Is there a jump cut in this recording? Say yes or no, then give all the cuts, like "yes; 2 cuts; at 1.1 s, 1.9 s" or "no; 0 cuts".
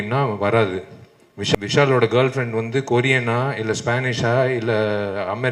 yes; 1 cut; at 1.5 s